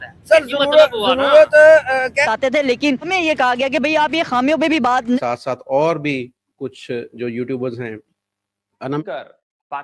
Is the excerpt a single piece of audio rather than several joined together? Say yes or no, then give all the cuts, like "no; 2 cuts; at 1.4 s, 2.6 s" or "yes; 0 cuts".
no; 3 cuts; at 2.2 s, 5.2 s, 9.0 s